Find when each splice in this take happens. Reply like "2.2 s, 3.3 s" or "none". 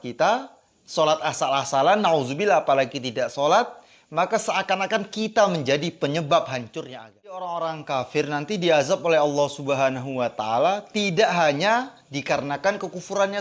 7.4 s